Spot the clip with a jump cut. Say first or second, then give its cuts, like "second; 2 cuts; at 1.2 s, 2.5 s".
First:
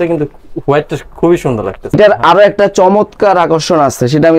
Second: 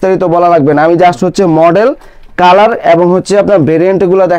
first; 1 cut; at 2.0 s